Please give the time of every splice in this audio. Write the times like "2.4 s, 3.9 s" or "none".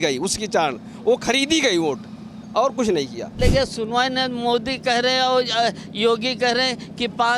3.3 s